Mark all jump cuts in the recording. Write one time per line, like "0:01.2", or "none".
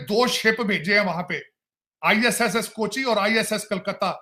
none

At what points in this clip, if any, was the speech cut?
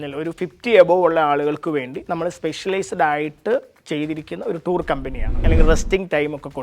0:05.3

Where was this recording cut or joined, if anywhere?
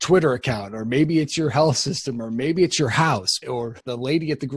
0:03.5

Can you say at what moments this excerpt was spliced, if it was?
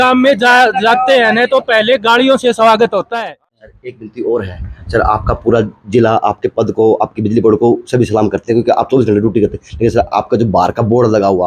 0:03.2

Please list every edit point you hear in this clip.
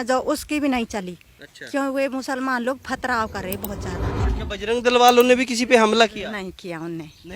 0:04.3

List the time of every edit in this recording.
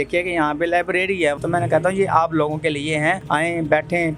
0:01.4
0:03.2

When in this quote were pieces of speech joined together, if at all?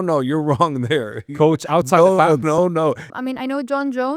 0:03.1

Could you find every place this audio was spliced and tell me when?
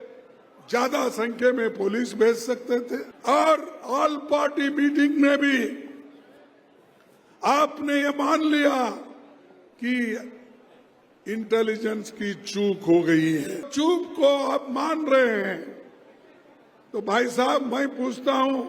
0:03.1
0:13.7

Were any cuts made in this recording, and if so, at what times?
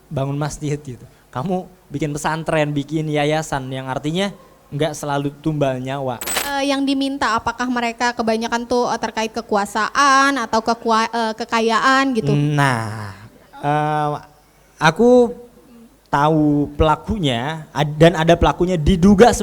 0:06.4

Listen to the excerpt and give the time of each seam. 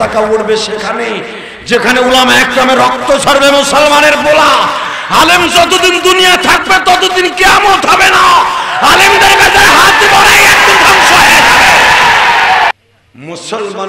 0:12.7

